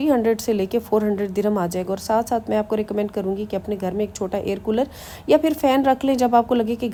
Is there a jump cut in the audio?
no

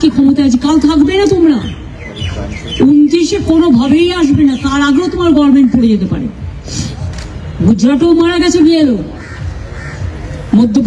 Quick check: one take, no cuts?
yes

